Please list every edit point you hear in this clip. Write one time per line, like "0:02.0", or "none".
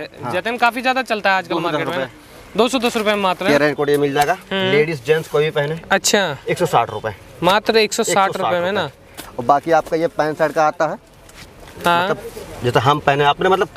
0:03.5